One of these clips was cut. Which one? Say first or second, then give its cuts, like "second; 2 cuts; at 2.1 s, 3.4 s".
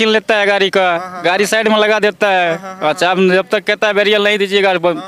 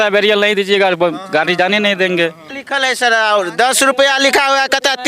second; 1 cut; at 2.6 s